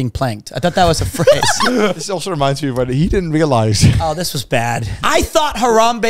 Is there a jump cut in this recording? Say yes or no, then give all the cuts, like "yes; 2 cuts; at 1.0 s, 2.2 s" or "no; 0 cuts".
yes; 2 cuts; at 2.0 s, 4.9 s